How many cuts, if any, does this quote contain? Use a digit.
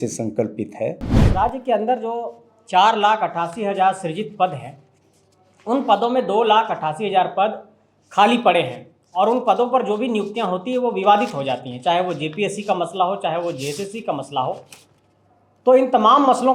1